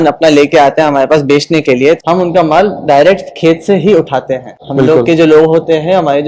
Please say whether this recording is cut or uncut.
cut